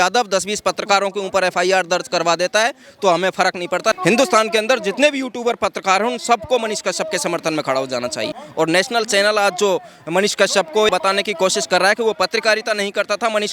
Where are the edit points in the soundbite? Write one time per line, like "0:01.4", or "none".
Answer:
0:04.0
0:08.4
0:10.9